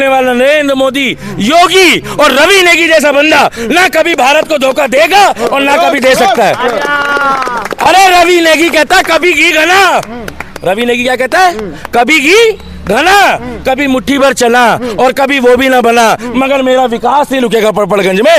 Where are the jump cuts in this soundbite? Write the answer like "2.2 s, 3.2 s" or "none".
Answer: none